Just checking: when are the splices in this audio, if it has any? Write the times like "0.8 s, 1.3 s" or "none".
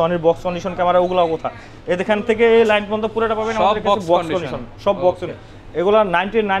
none